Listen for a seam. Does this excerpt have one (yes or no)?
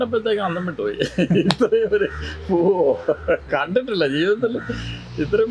no